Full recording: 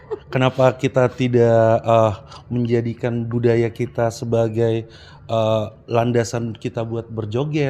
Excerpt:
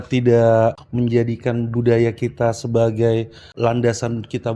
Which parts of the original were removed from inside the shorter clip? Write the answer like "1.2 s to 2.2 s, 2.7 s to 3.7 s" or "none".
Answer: 1.8 s to 2.3 s, 5.0 s to 5.8 s